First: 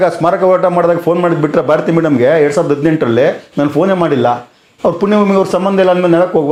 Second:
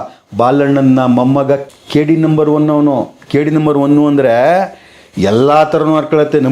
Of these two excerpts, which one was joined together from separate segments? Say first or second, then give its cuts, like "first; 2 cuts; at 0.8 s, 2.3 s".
second; 1 cut; at 1.7 s